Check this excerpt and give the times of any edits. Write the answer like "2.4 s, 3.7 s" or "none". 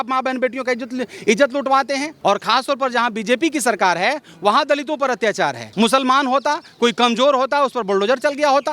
2.1 s, 5.6 s